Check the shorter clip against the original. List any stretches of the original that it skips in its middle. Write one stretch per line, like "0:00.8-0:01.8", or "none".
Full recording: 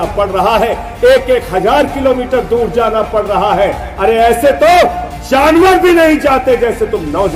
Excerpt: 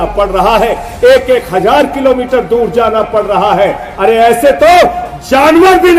none